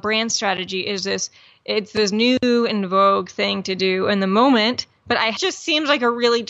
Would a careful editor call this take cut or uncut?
cut